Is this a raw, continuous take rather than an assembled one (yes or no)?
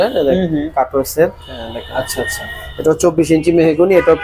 yes